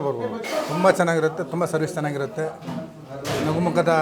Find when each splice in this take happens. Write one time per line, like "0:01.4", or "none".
none